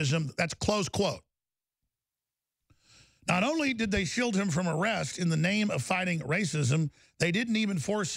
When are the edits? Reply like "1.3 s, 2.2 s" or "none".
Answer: none